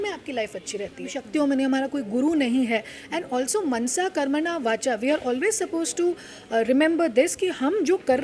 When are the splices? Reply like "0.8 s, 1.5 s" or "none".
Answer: 1.2 s